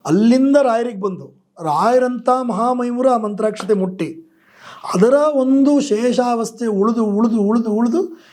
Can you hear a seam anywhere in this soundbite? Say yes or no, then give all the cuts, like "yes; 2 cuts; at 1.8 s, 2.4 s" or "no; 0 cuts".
no; 0 cuts